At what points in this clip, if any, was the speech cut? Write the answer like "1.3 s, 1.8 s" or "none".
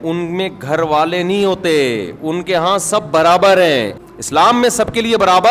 4.0 s